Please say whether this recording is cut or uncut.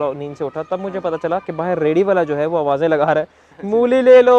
uncut